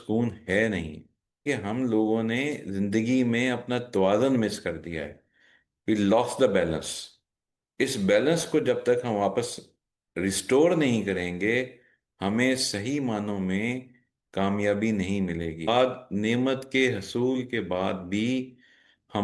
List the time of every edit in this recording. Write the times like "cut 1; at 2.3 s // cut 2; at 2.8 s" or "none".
cut 1; at 1.4 s // cut 2; at 15.7 s